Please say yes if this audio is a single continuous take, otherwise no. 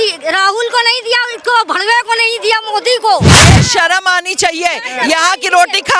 no